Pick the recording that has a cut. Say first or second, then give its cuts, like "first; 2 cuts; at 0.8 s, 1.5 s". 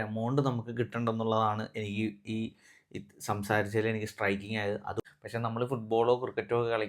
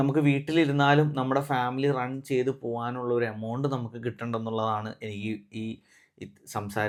first; 1 cut; at 5.0 s